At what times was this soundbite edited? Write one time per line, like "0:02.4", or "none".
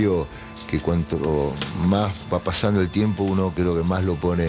none